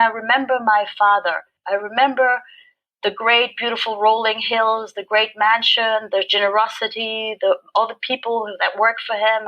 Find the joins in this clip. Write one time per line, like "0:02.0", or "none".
0:01.6